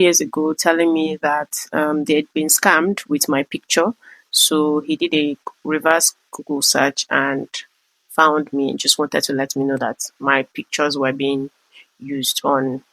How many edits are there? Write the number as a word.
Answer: zero